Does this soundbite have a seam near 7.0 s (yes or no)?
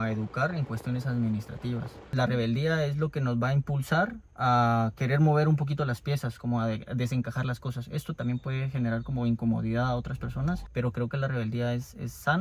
no